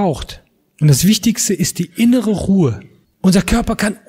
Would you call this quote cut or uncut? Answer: cut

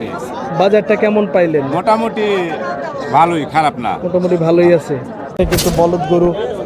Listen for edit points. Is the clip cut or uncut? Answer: cut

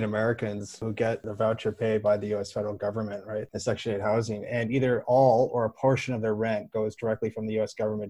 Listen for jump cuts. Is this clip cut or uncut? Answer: cut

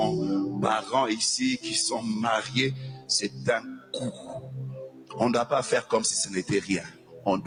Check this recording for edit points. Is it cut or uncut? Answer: uncut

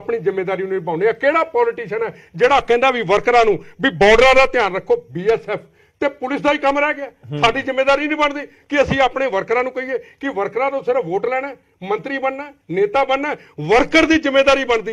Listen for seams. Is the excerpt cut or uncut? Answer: uncut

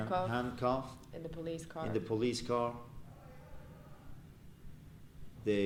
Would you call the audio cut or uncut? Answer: uncut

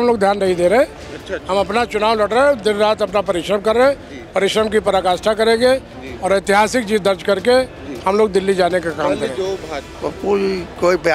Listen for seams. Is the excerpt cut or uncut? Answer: cut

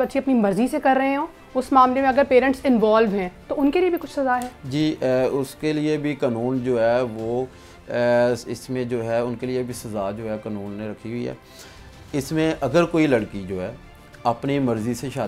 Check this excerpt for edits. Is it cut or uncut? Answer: uncut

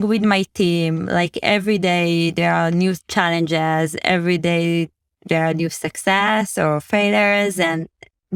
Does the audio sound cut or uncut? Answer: uncut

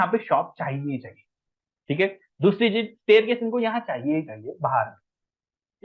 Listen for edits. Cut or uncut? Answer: uncut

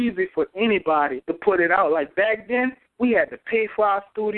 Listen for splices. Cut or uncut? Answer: cut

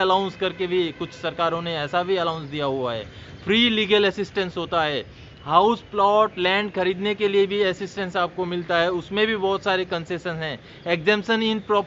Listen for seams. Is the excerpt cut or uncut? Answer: uncut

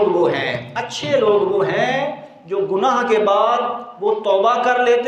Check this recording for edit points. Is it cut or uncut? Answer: uncut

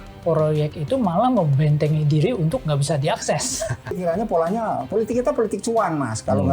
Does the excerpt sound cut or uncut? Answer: cut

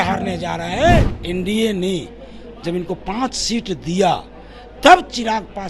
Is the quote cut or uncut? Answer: cut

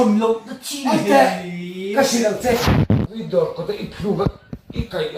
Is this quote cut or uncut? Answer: cut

